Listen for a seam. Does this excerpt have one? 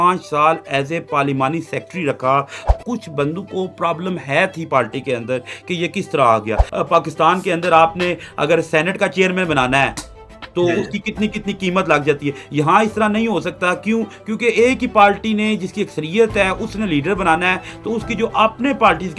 yes; 2 cuts; at 2.7 s, 6.6 s

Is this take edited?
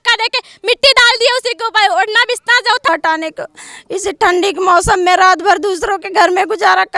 yes; 1 cut; at 2.9 s

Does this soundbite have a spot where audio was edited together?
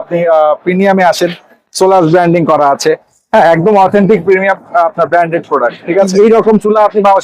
yes; 1 cut; at 6.1 s

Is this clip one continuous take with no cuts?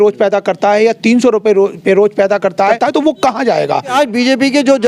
no; 2 cuts; at 2.8 s, 3.9 s

